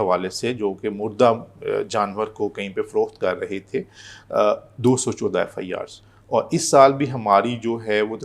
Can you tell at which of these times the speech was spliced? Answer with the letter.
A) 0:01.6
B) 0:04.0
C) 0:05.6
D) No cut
D